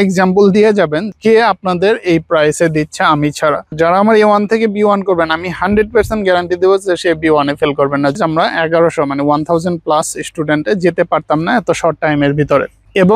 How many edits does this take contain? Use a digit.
3